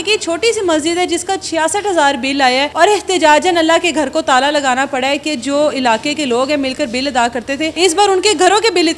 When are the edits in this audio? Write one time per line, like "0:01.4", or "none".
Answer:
0:02.7
0:07.7